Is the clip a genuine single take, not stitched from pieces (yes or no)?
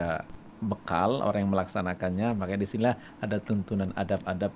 yes